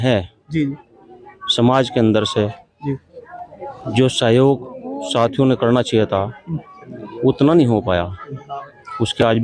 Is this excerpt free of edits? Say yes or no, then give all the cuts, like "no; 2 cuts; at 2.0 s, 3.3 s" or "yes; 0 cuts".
yes; 0 cuts